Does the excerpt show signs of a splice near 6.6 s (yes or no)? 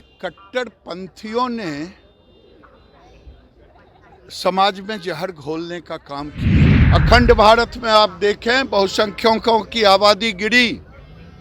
yes